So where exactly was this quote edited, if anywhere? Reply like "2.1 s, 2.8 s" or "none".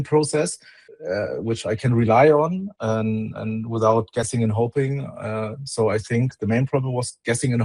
none